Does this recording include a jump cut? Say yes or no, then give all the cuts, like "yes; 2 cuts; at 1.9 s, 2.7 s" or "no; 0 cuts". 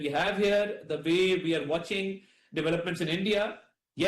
yes; 1 cut; at 1.3 s